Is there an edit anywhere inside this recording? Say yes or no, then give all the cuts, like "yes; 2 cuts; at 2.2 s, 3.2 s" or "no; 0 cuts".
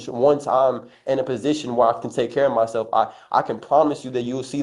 no; 0 cuts